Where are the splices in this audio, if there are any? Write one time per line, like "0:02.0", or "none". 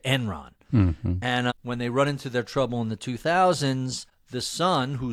none